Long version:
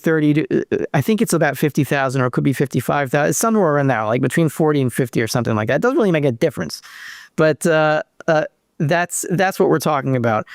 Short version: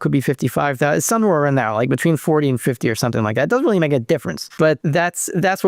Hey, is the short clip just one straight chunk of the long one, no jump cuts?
no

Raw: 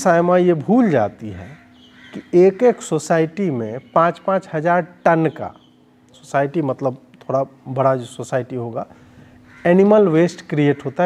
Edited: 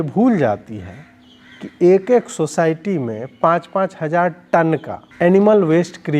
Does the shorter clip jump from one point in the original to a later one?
yes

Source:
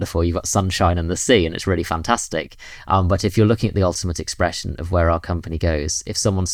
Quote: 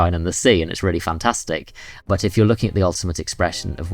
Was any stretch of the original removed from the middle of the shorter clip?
yes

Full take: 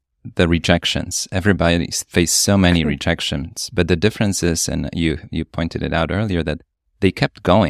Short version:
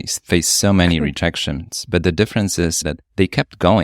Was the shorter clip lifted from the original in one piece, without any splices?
no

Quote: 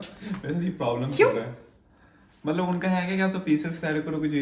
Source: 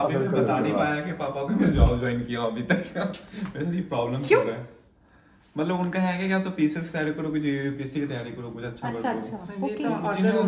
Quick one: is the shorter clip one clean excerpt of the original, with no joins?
yes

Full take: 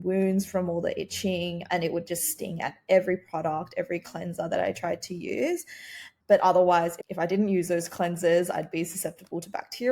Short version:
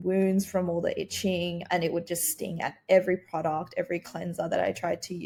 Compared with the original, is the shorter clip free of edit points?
yes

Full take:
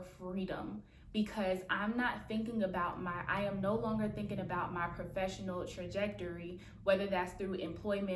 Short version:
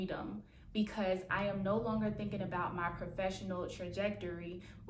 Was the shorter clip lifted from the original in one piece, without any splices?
no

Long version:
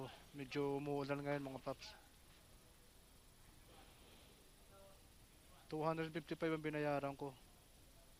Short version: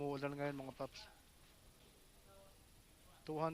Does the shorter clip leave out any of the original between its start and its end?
yes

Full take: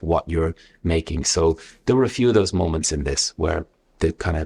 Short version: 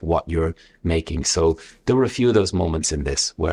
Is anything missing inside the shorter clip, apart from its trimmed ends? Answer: no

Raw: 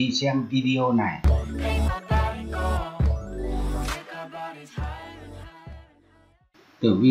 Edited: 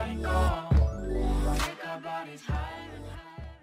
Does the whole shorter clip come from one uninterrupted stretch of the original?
yes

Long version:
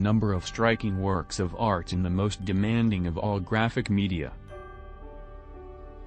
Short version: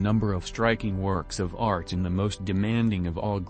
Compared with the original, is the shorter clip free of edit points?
yes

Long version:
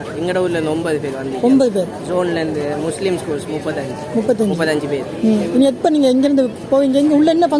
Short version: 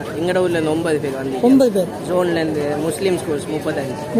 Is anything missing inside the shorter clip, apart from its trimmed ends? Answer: no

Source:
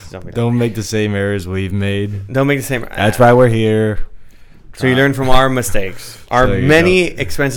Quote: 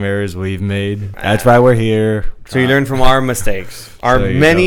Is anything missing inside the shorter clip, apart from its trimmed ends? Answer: yes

